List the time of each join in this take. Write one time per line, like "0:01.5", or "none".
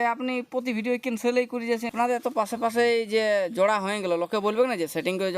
0:01.9